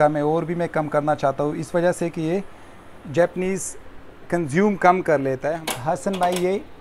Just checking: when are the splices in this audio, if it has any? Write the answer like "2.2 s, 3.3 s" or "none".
5.5 s